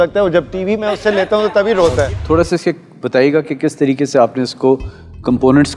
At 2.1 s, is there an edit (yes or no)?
yes